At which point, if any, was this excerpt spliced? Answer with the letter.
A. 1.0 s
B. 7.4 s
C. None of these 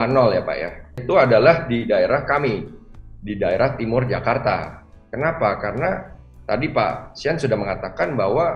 A